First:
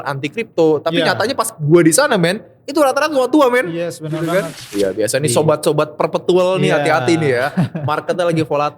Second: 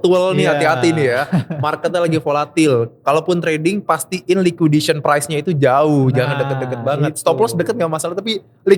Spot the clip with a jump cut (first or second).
first